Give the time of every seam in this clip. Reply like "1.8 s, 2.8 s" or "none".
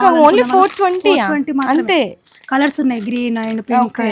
none